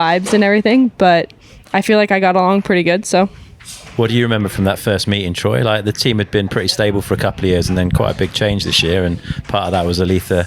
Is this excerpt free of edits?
yes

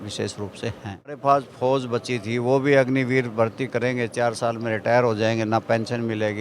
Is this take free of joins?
no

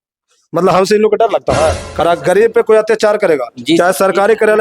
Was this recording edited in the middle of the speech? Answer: yes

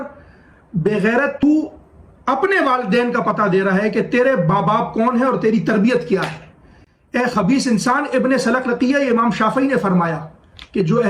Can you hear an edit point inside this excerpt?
yes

